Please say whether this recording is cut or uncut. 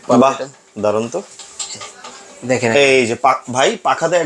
uncut